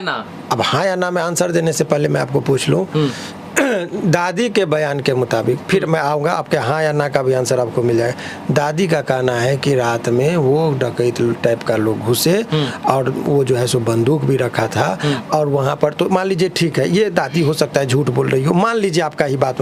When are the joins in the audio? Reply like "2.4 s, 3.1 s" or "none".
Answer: none